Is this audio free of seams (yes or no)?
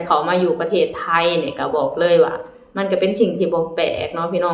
yes